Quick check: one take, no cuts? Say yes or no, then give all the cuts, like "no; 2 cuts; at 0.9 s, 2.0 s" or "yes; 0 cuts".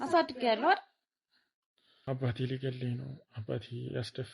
no; 1 cut; at 2.1 s